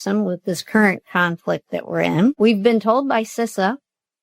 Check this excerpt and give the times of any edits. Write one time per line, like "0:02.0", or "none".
0:02.4